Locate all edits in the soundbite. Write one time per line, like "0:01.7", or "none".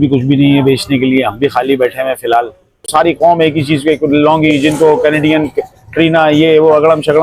0:02.8

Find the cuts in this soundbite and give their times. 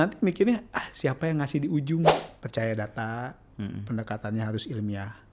0:02.3

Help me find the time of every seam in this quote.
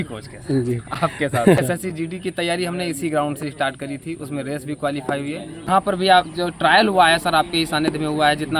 0:01.6
0:05.7

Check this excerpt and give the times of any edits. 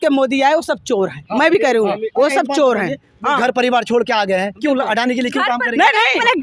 none

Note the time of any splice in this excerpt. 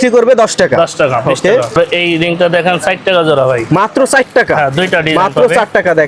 0:01.8

